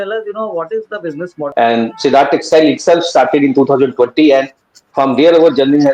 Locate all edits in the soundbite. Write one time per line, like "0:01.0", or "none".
0:01.3

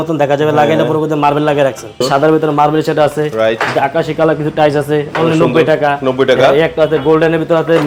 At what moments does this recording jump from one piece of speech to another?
0:02.0

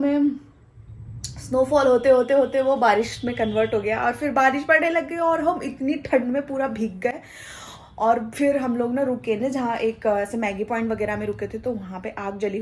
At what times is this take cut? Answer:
none

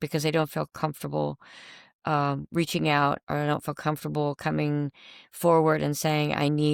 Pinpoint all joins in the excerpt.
none

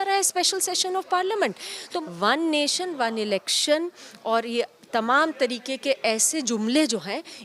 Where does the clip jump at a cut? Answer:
0:02.0

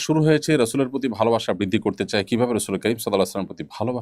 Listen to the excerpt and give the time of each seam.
none

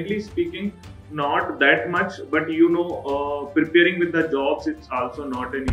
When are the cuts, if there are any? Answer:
none

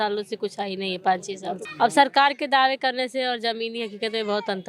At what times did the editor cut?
0:01.7

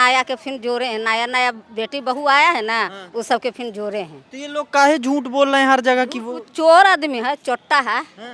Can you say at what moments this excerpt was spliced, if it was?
none

